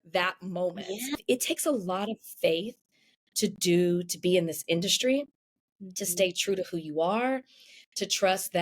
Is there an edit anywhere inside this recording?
yes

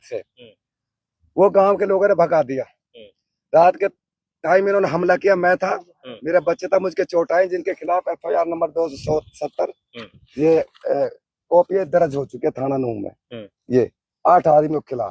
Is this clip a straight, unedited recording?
yes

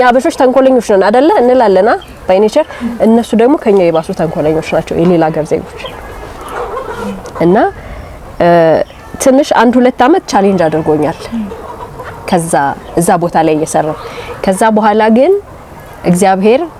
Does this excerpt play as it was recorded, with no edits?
yes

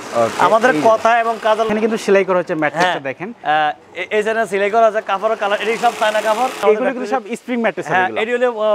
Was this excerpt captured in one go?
no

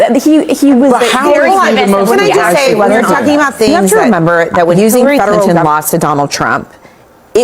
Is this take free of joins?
no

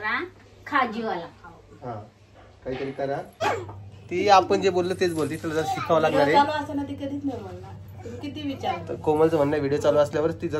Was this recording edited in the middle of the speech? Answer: yes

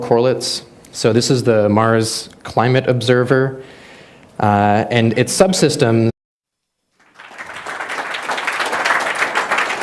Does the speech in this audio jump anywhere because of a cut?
no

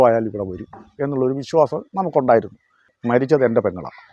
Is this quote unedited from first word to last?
no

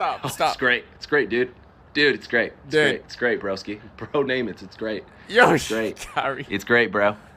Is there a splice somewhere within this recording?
no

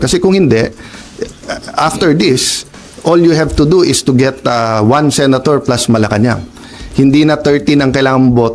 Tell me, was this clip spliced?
no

